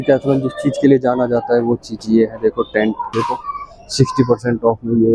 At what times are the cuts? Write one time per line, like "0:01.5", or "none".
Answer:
0:03.1